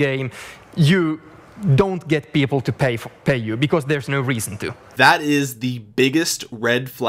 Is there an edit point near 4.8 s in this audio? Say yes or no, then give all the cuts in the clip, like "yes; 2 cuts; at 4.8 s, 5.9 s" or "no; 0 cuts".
yes; 1 cut; at 4.8 s